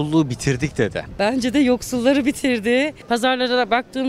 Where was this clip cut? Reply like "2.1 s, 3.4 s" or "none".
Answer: 1.0 s, 3.0 s